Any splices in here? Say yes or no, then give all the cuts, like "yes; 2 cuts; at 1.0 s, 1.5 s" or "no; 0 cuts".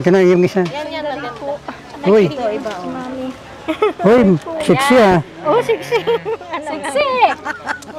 no; 0 cuts